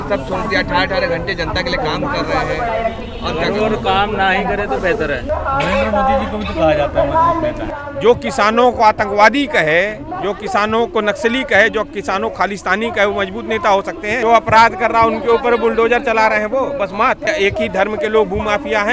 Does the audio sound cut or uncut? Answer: cut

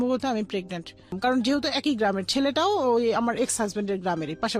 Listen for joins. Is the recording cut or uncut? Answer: cut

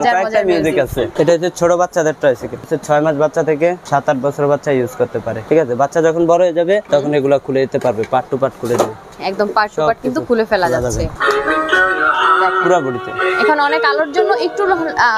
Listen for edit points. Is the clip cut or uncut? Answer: cut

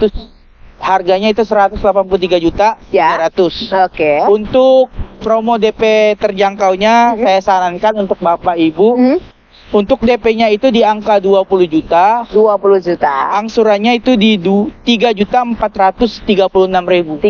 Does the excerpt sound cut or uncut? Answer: uncut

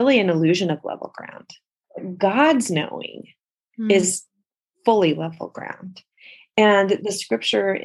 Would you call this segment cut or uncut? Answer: cut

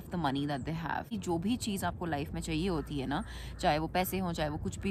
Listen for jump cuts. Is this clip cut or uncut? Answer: cut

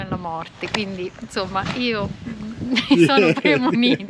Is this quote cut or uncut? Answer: uncut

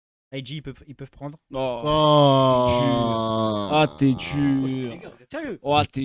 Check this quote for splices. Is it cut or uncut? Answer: uncut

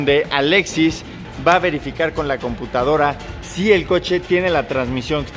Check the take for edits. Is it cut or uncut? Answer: uncut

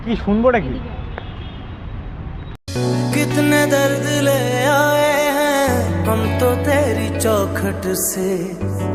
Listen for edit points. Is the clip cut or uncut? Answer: uncut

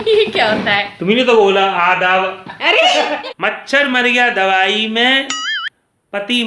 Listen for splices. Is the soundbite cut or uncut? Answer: cut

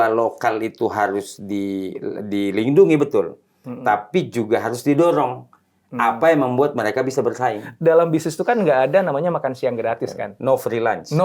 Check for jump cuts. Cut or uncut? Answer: cut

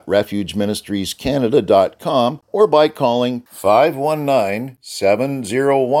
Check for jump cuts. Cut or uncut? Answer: cut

